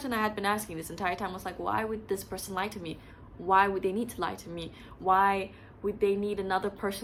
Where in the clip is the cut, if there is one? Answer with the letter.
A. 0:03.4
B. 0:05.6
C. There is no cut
C